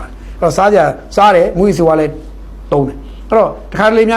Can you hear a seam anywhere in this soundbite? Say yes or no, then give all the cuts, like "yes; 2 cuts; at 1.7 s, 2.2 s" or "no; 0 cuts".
no; 0 cuts